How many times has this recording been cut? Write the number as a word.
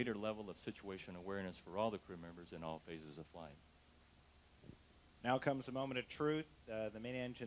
one